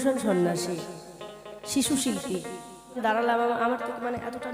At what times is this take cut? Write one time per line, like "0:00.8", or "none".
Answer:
0:03.0